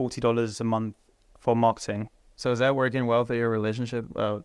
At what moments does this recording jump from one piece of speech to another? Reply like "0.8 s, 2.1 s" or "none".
2.2 s

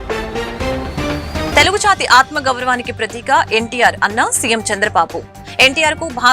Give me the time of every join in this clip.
1.5 s

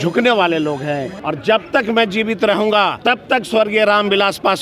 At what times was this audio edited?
1.1 s, 3.0 s

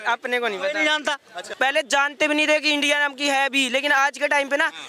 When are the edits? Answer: 1.5 s

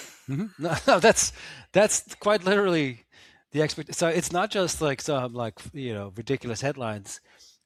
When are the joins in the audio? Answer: none

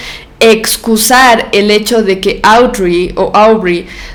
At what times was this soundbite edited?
none

